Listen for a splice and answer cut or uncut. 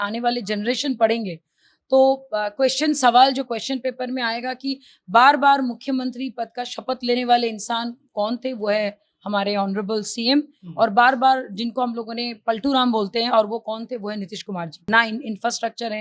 cut